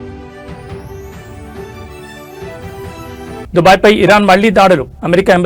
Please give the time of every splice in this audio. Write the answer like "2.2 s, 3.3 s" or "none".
none